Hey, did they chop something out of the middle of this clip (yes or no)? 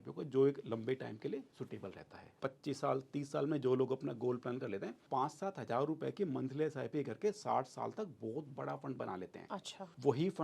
yes